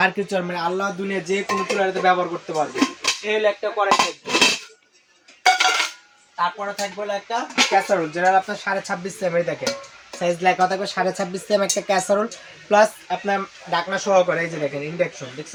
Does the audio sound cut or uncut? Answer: uncut